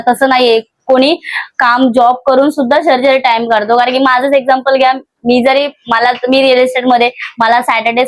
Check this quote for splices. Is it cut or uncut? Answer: uncut